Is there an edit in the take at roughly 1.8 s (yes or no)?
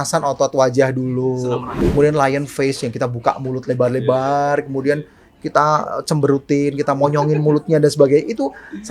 yes